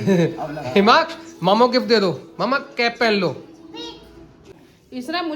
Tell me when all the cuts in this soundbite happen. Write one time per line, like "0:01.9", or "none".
0:04.3